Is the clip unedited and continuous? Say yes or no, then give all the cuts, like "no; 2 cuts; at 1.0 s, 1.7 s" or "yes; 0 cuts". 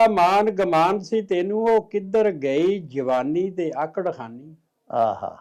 yes; 0 cuts